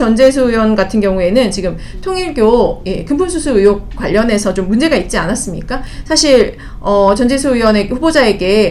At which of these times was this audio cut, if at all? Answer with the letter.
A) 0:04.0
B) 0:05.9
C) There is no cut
B